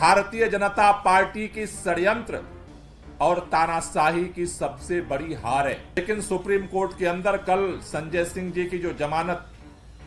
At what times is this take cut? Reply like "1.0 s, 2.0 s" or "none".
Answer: 6.0 s